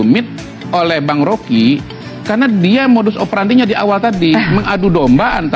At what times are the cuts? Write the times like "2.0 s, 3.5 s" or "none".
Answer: none